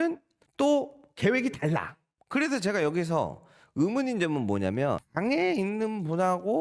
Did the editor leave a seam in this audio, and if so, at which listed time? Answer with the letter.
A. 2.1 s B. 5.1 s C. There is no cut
B